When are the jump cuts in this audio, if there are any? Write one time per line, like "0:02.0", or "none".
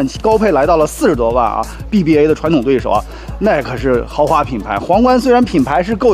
0:01.8